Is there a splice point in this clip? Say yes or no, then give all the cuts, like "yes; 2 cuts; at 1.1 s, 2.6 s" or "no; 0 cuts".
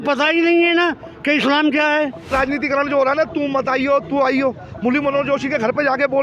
yes; 1 cut; at 2.3 s